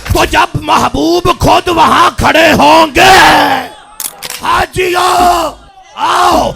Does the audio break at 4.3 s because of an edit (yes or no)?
yes